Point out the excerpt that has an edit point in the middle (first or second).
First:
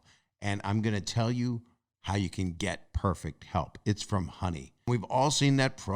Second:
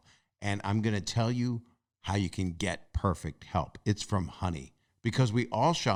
first